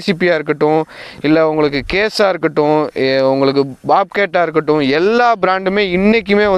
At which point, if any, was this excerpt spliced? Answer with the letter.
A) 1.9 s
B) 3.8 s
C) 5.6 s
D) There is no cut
D